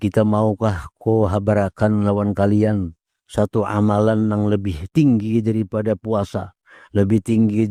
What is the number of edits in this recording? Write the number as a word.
zero